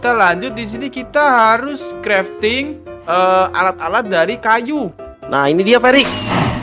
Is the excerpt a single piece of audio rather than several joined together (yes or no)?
no